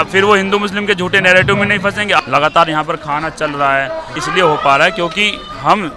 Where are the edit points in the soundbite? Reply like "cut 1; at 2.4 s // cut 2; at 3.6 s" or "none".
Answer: cut 1; at 2.2 s // cut 2; at 4.2 s